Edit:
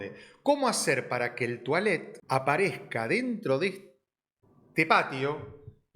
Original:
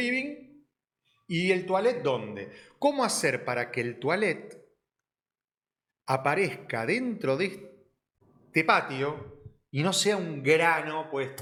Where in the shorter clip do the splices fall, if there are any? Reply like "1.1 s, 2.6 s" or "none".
2.1 s